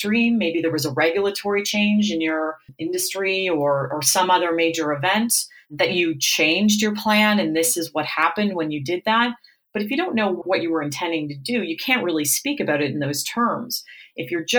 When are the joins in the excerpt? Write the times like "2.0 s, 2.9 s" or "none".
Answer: 2.7 s, 10.4 s